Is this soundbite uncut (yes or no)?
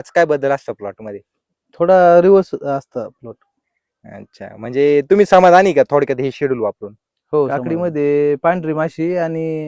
no